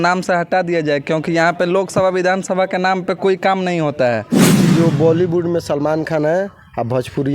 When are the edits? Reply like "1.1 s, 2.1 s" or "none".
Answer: 4.7 s

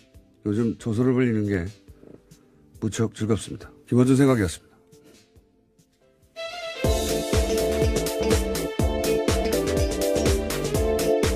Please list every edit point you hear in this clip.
0.9 s

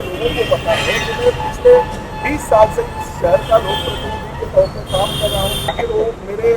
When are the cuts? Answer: 5.7 s

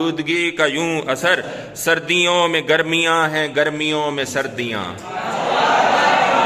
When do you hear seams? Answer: none

